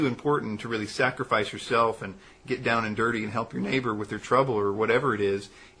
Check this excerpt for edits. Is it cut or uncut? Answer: uncut